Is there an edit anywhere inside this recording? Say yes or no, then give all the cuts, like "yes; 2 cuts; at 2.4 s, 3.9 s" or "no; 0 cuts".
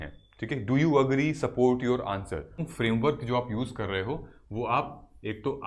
yes; 1 cut; at 2.7 s